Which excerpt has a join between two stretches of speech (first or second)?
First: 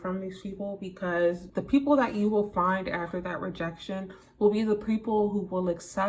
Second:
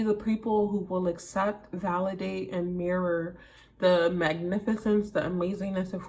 first